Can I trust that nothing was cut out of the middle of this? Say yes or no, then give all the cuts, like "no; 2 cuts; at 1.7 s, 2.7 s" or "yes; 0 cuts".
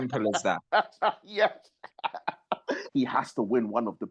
no; 1 cut; at 2.8 s